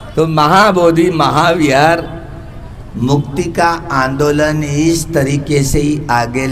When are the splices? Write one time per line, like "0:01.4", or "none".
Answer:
none